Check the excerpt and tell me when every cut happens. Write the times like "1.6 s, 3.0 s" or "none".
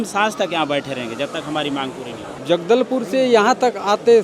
2.3 s